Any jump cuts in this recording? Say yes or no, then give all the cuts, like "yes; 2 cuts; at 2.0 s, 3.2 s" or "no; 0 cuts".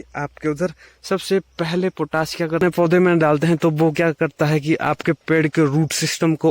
yes; 1 cut; at 2.6 s